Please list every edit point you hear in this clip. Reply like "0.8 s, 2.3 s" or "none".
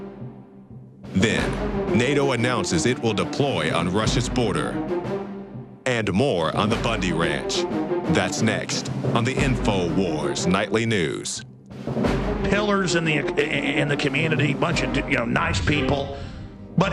4.5 s